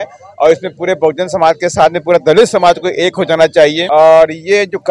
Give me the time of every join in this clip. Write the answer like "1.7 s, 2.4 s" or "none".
3.8 s